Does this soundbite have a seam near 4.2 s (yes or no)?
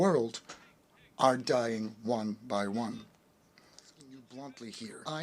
yes